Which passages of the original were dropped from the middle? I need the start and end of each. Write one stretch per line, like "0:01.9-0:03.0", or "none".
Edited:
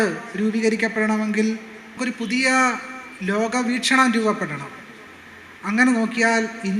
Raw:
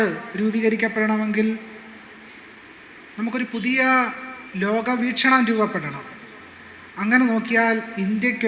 0:02.0-0:03.3

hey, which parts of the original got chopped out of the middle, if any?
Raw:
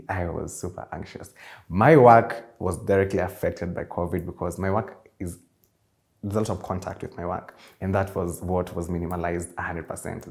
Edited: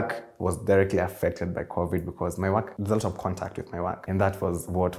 0:04.9-0:06.2
0:07.5-0:07.7

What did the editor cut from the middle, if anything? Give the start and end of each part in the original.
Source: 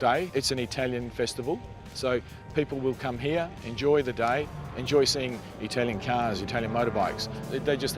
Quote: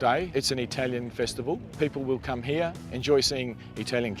0:01.7-0:02.4
0:03.6-0:04.7

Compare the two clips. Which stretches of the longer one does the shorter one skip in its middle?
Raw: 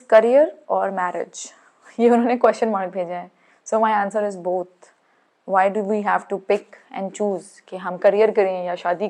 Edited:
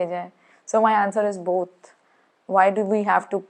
none

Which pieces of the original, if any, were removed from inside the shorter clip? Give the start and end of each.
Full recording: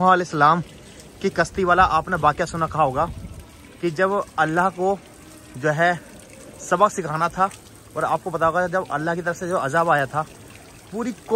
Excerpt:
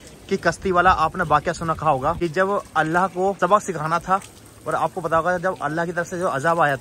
0:03.1-0:03.8
0:05.0-0:06.7

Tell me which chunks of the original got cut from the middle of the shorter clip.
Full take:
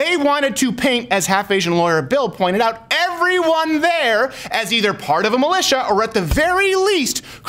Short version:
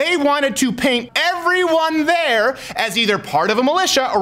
0:01.0-0:02.8

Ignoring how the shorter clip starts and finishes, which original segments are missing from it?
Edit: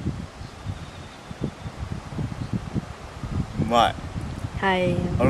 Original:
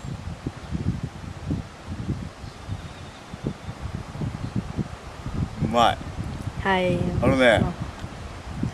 none

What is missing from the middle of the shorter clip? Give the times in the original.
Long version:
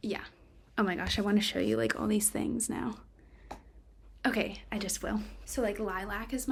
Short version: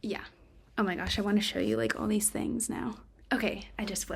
0:03.1-0:04.0

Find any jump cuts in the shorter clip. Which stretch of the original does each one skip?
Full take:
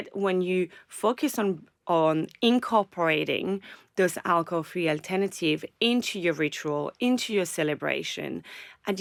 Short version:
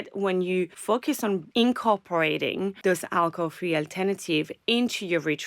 0:01.3-0:02.2
0:03.6-0:03.9

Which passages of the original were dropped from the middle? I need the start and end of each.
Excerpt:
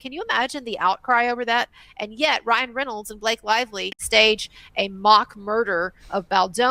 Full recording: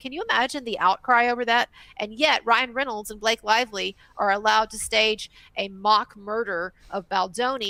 0:04.0-0:04.8

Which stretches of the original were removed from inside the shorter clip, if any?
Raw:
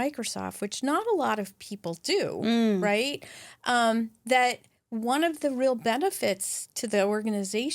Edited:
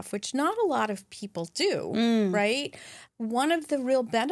0:03.5-0:04.7

